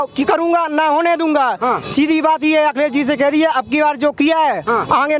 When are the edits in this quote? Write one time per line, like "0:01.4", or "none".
none